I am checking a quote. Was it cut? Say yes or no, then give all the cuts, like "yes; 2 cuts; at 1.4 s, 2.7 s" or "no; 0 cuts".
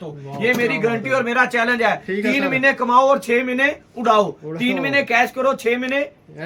no; 0 cuts